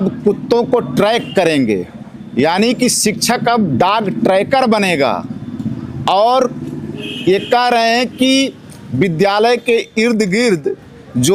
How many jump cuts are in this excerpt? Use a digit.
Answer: 0